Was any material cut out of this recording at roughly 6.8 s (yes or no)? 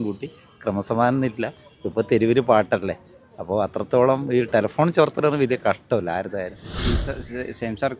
yes